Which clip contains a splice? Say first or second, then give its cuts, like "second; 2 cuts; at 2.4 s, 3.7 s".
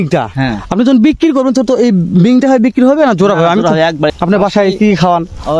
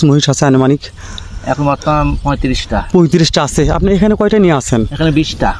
first; 1 cut; at 4.1 s